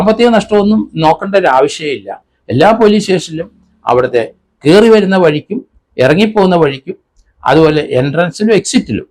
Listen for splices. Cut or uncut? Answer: uncut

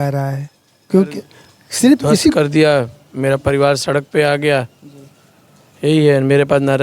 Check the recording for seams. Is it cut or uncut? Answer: cut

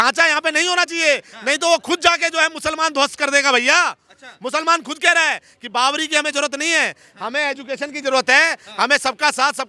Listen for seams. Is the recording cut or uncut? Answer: uncut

